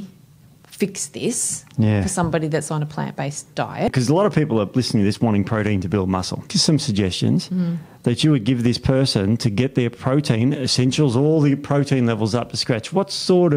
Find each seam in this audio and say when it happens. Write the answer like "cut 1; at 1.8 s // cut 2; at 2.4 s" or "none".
cut 1; at 3.9 s // cut 2; at 6.5 s